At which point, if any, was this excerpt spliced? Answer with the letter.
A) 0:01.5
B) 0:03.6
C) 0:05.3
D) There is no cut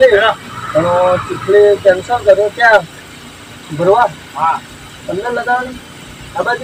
D